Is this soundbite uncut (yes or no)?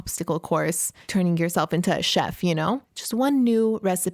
no